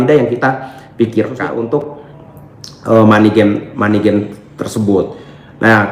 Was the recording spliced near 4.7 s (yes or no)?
no